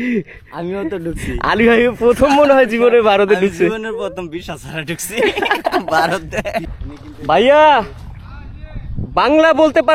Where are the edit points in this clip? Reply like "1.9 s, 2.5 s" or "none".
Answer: 6.8 s